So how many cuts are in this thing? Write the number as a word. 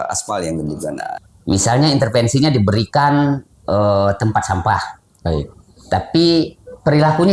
one